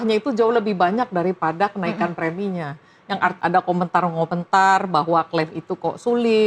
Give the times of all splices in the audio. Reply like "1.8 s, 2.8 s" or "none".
3.4 s